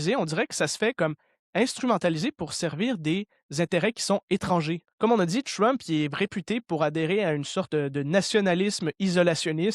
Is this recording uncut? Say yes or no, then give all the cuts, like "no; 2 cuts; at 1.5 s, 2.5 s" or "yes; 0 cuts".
no; 1 cut; at 4.9 s